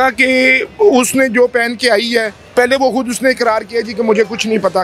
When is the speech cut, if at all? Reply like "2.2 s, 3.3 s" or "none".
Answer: 2.4 s